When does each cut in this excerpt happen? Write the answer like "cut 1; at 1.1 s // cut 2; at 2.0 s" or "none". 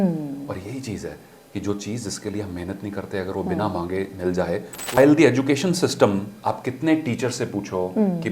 cut 1; at 5.0 s